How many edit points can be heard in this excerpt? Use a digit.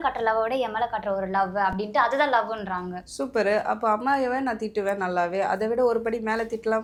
0